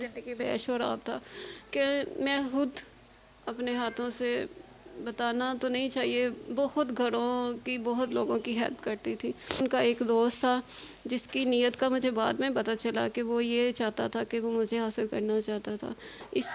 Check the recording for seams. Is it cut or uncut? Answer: cut